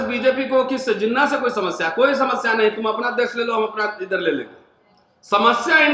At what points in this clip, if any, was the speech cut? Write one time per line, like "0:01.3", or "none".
none